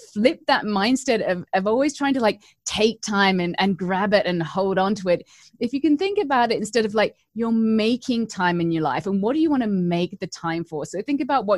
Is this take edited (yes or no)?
no